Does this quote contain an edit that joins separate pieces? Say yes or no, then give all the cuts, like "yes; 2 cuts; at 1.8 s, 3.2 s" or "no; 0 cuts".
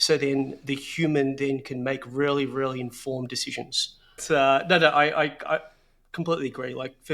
yes; 1 cut; at 4.2 s